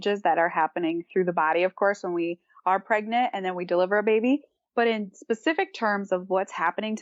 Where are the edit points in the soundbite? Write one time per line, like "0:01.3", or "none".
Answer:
none

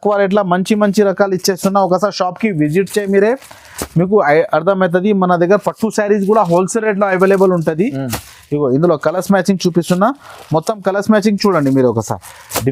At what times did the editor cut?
none

